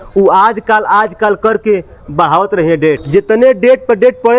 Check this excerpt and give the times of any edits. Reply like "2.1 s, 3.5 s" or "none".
3.0 s